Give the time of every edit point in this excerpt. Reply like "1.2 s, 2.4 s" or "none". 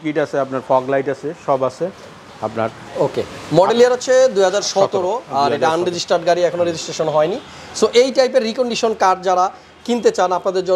none